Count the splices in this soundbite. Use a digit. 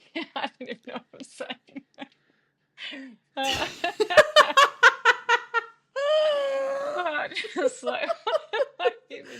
1